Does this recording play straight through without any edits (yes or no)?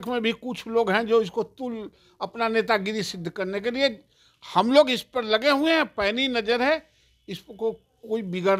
yes